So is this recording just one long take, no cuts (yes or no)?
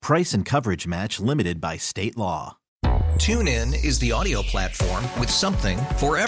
no